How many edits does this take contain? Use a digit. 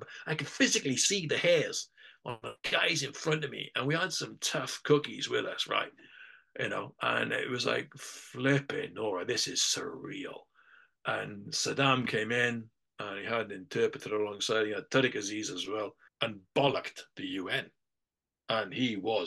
1